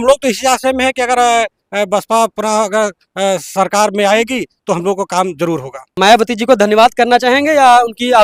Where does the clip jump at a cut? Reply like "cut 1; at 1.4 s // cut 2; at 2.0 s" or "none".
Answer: cut 1; at 5.9 s